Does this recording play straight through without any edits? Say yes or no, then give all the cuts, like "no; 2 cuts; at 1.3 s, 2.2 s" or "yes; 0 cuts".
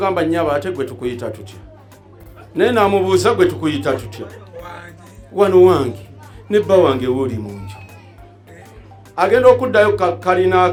yes; 0 cuts